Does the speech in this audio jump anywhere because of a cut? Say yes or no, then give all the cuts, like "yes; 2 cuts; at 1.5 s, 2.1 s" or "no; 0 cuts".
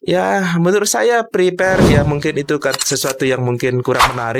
no; 0 cuts